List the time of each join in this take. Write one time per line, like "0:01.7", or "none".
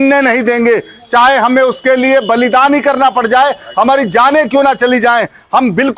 none